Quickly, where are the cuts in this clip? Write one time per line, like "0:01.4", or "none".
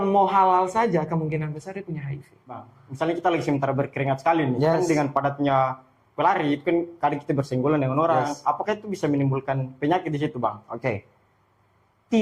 0:02.8

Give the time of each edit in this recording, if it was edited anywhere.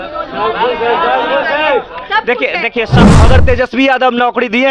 0:03.1

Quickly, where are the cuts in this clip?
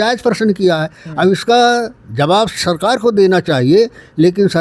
none

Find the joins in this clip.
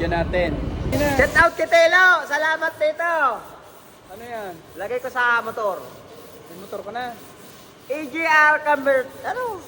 0:00.9

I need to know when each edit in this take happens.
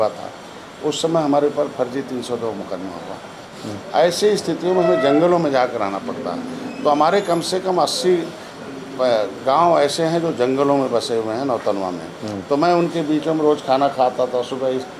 0:03.4

